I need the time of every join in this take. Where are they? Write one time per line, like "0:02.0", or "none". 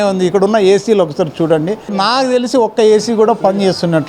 0:02.0